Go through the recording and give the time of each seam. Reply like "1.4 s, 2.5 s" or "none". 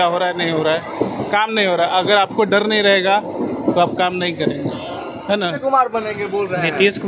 5.6 s